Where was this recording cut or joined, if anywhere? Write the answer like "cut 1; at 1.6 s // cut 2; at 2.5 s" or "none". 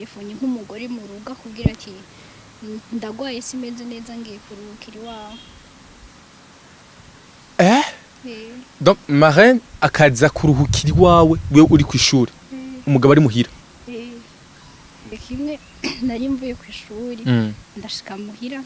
cut 1; at 15.2 s